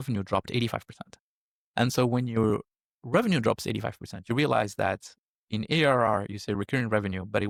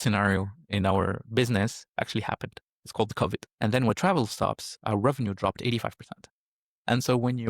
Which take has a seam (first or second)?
second